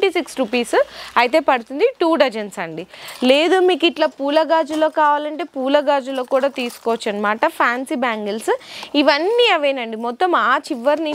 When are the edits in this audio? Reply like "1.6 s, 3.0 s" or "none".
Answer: none